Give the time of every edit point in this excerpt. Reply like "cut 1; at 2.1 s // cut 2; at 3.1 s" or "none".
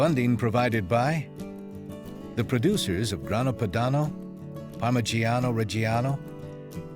cut 1; at 1.4 s